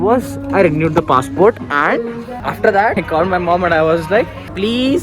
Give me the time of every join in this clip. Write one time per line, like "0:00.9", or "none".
0:02.3
0:02.9